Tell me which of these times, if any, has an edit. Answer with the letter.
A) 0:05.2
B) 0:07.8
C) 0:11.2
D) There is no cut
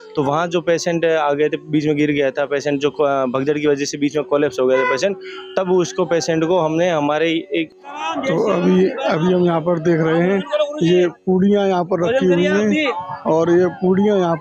B